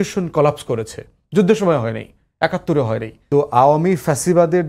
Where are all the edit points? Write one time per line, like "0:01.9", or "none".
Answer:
0:03.1